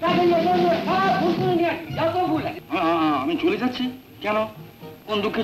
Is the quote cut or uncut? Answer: cut